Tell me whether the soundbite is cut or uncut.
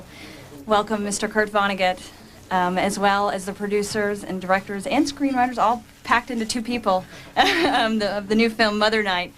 cut